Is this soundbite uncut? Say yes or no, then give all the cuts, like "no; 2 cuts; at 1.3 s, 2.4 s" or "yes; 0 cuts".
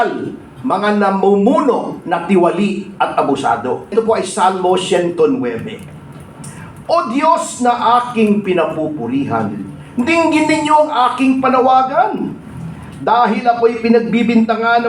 no; 1 cut; at 3.9 s